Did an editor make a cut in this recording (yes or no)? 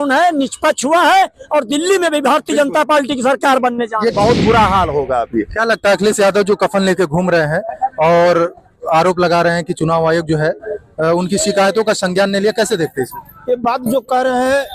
yes